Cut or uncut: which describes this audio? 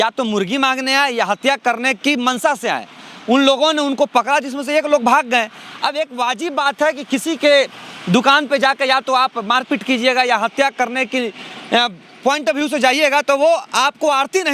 uncut